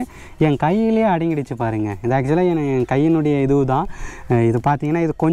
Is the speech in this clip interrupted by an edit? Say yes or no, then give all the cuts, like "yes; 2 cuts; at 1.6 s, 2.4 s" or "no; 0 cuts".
no; 0 cuts